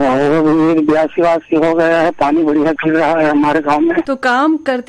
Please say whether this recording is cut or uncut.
uncut